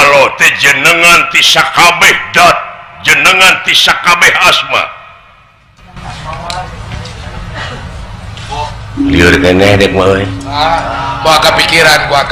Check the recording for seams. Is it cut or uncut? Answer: uncut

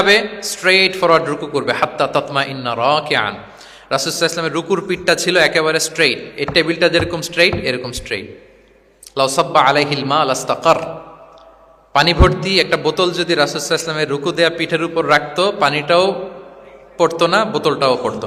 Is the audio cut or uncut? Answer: uncut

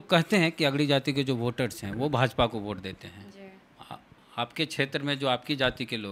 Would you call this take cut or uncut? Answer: uncut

